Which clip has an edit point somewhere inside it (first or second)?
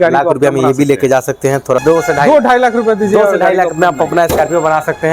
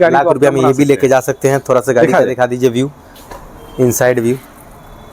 first